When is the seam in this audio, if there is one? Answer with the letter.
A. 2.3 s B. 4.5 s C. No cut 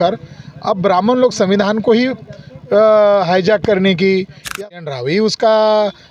B